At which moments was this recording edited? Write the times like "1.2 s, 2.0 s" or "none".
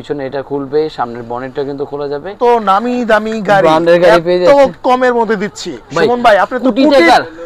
2.4 s